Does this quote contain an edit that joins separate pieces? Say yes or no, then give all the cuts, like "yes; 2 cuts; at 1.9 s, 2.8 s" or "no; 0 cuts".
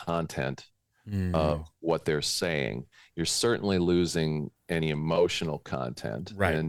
no; 0 cuts